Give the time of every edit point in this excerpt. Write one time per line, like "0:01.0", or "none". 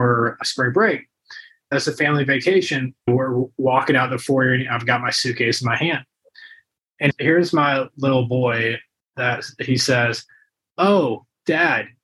0:01.7
0:03.0